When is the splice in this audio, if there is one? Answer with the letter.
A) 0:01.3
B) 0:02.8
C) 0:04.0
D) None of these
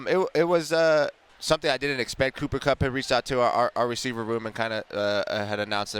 A